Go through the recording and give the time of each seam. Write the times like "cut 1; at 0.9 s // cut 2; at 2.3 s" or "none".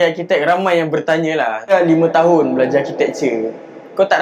cut 1; at 1.7 s